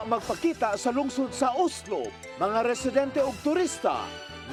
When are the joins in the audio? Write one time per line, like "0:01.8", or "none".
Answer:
none

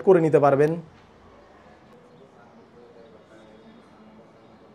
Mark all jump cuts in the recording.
0:01.9
0:03.7

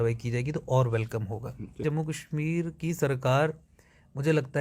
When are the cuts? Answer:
0:01.8

